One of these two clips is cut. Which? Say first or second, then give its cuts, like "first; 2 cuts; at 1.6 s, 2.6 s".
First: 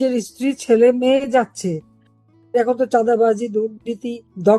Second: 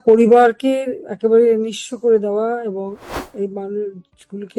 first; 1 cut; at 1.9 s